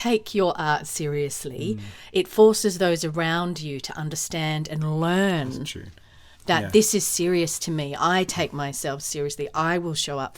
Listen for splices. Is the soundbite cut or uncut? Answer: uncut